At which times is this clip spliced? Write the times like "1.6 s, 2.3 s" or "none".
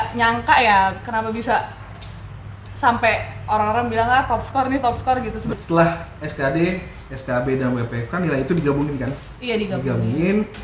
5.5 s